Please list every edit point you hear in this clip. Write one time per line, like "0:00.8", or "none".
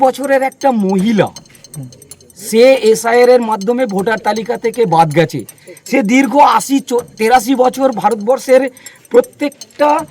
none